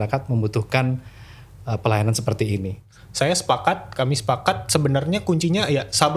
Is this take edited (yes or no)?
yes